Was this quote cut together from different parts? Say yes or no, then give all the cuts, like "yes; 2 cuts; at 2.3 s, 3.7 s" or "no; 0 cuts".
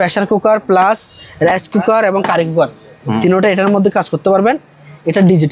no; 0 cuts